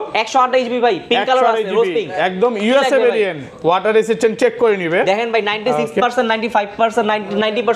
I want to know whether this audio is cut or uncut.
uncut